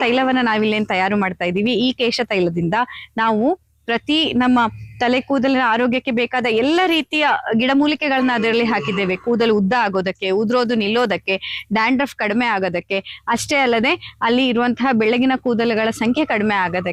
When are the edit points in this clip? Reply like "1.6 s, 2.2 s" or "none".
none